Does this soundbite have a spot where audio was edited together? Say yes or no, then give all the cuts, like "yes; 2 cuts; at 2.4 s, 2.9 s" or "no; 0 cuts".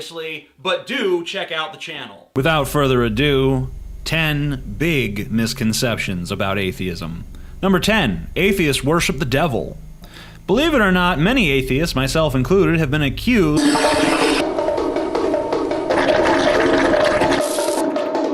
no; 0 cuts